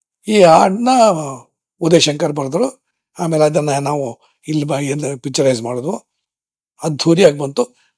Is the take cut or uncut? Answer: uncut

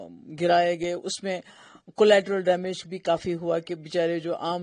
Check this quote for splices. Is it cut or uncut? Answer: uncut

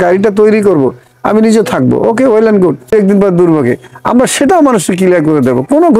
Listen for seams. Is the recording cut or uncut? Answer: cut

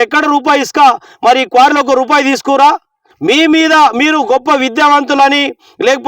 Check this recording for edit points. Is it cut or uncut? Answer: cut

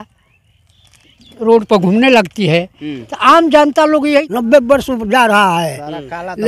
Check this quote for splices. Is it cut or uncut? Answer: cut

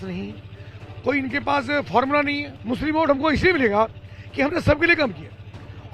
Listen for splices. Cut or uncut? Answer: cut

